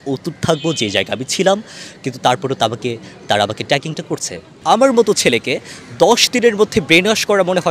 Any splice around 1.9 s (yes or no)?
no